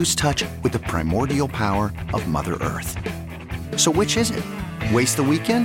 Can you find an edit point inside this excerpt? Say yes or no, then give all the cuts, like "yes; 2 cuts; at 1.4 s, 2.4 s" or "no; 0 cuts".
no; 0 cuts